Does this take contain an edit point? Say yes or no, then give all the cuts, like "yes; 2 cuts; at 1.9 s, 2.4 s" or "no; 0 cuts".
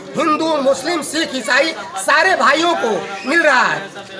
no; 0 cuts